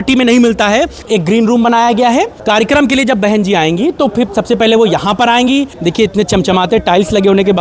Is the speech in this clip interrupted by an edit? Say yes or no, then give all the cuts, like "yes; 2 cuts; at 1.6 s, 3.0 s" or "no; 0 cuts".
yes; 3 cuts; at 1.0 s, 2.4 s, 5.7 s